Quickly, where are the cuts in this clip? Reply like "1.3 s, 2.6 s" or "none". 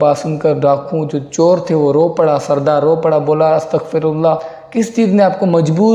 4.6 s